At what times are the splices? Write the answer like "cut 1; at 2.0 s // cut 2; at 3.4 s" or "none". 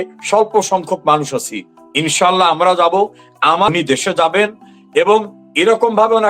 cut 1; at 3.7 s